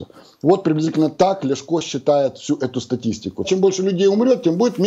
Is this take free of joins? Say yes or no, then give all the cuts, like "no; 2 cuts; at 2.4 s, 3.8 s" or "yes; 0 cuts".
no; 1 cut; at 3.5 s